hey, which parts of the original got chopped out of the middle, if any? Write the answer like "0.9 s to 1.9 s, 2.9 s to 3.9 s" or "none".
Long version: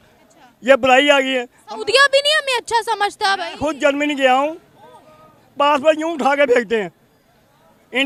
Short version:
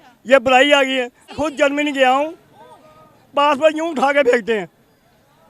1.6 s to 3.5 s